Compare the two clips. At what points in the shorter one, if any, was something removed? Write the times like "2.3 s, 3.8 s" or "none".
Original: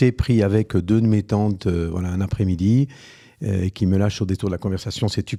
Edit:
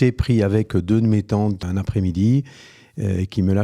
1.6 s